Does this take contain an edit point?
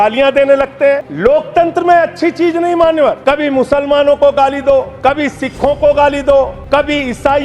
yes; 4 cuts; at 1.1 s, 3.2 s, 4.9 s, 6.6 s

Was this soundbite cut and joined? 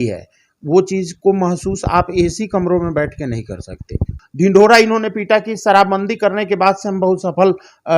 yes; 1 cut; at 4.1 s

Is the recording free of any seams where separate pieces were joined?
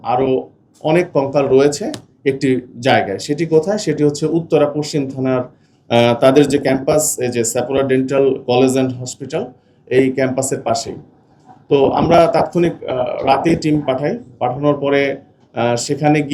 yes; 0 cuts

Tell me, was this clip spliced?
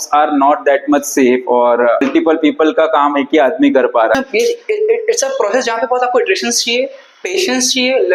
yes; 2 cuts; at 2.1 s, 4.1 s

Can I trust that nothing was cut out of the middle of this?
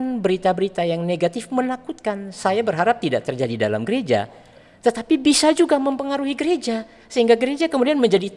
yes; 0 cuts

